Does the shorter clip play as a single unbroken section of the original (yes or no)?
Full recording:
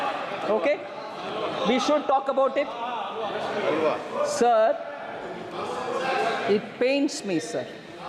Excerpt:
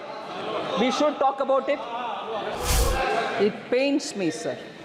no